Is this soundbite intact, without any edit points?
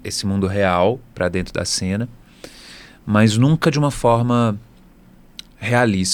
yes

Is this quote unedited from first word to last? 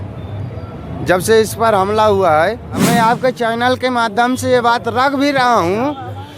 no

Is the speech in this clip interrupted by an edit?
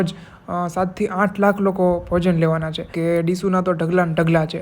yes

